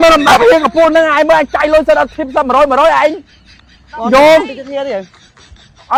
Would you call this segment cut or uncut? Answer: uncut